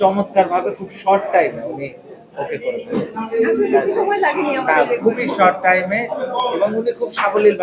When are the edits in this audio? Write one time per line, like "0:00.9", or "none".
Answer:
none